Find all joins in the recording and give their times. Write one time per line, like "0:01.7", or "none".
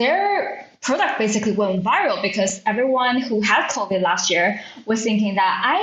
none